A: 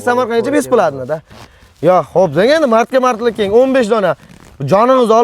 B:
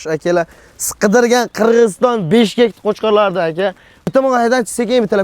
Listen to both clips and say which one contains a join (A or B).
B